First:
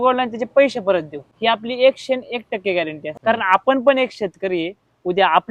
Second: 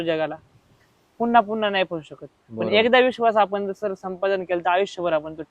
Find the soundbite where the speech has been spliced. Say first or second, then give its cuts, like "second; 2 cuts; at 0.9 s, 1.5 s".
first; 2 cuts; at 1.2 s, 3.0 s